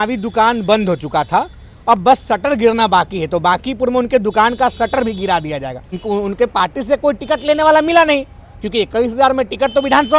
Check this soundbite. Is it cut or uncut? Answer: cut